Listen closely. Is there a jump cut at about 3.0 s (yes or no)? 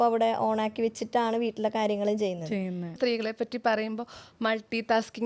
yes